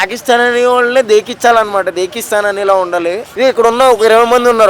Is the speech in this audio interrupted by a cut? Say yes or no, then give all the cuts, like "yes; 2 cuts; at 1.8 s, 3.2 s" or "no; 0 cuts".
yes; 1 cut; at 3.3 s